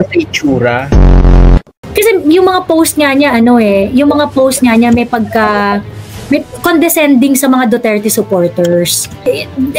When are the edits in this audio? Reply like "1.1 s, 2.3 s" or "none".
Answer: 1.3 s